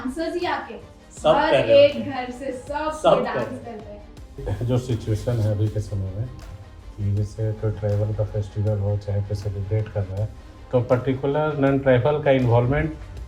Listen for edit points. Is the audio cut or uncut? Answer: cut